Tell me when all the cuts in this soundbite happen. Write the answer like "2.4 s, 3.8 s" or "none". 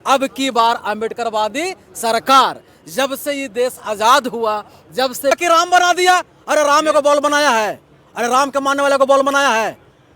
5.4 s